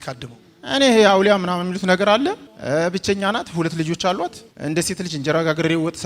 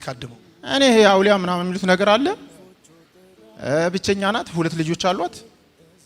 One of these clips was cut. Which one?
first; 2 cuts; at 2.5 s, 4.5 s

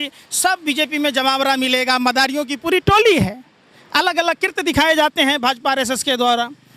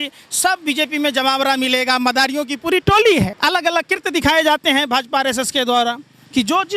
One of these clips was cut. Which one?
second; 1 cut; at 3.3 s

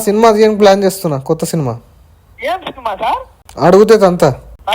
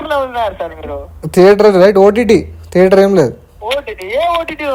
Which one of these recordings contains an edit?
first; 1 cut; at 3.4 s

